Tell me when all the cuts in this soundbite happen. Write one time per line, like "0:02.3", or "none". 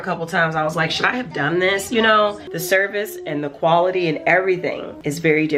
0:02.5